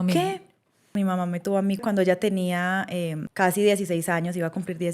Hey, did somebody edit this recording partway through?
yes; 3 cuts; at 0.9 s, 1.8 s, 3.2 s

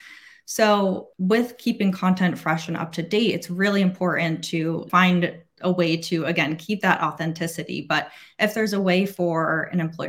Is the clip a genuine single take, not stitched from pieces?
no; 2 cuts; at 1.1 s, 4.8 s

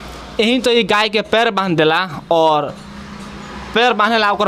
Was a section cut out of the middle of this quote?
no; 0 cuts

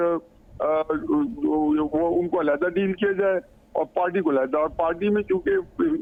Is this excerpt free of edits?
yes; 0 cuts

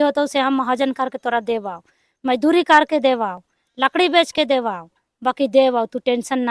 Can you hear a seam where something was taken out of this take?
no; 0 cuts

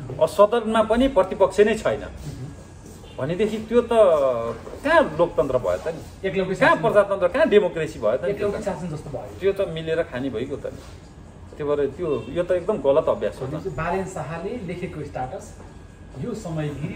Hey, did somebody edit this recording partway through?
no; 0 cuts

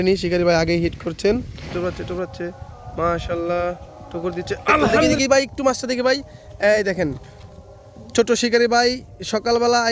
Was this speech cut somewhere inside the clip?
yes; 2 cuts; at 1.6 s, 5.2 s

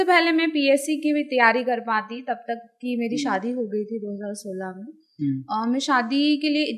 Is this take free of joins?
yes; 0 cuts

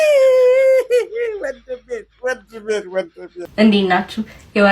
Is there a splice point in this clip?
yes; 1 cut; at 3.5 s

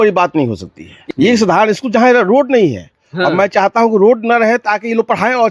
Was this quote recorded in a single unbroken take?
no; 1 cut; at 1.1 s

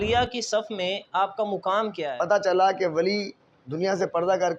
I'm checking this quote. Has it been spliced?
yes; 1 cut; at 2.0 s

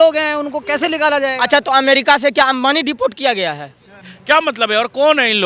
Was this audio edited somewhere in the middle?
yes; 1 cut; at 4.1 s

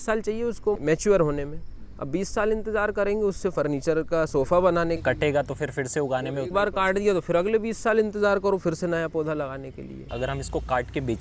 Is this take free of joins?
no; 1 cut; at 10.1 s

